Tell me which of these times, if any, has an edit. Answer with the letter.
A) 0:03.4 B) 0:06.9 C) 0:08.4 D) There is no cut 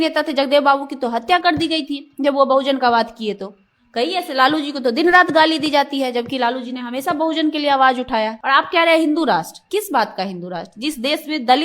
C